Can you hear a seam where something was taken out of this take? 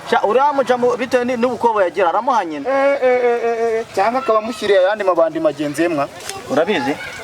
yes; 1 cut; at 6.3 s

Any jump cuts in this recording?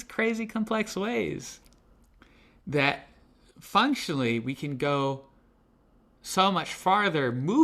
no; 0 cuts

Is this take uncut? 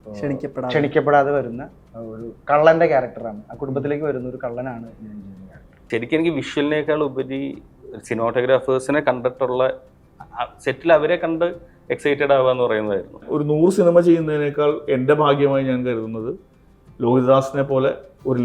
no; 2 cuts; at 5.8 s, 13.3 s

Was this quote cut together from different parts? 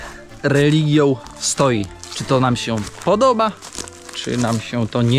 no; 0 cuts

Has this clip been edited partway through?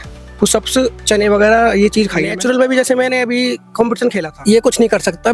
yes; 2 cuts; at 2.3 s, 4.3 s

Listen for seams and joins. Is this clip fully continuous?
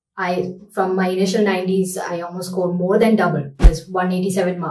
yes; 0 cuts

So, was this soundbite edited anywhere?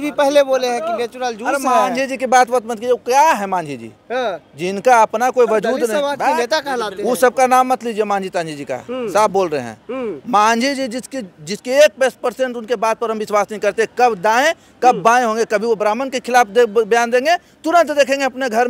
no; 0 cuts

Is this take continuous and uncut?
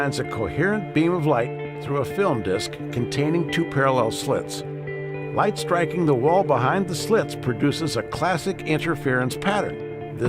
no; 1 cut; at 2.0 s

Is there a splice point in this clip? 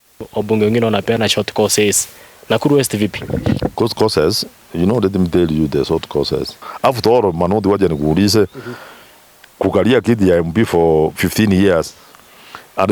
yes; 1 cut; at 6.6 s

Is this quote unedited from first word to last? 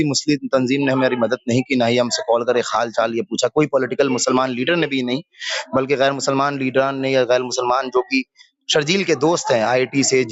yes; 0 cuts

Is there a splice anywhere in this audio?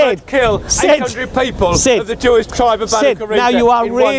no; 0 cuts

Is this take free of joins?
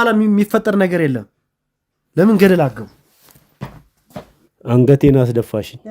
no; 1 cut; at 4.4 s

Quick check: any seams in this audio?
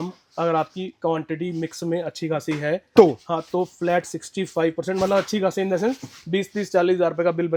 no; 0 cuts

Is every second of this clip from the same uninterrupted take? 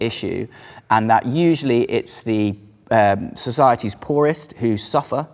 yes; 0 cuts

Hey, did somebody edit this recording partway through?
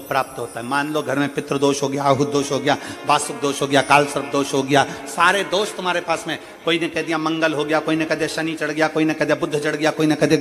no; 0 cuts

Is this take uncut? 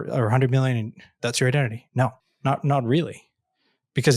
no; 1 cut; at 2.3 s

